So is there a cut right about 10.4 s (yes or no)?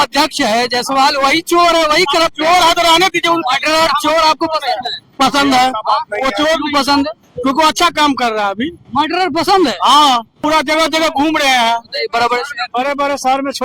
yes